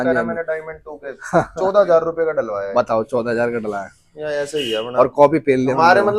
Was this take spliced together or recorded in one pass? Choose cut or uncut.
uncut